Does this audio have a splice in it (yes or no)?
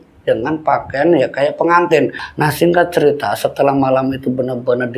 yes